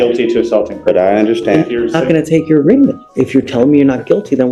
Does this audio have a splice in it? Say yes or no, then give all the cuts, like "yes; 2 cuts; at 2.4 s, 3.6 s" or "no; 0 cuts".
no; 0 cuts